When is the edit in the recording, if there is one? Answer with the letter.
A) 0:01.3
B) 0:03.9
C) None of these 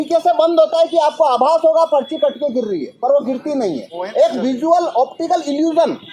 B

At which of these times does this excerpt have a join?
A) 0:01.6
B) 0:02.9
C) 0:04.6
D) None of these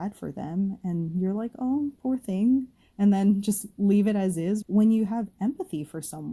C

